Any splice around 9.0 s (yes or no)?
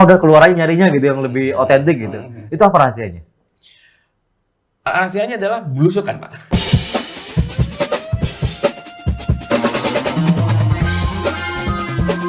no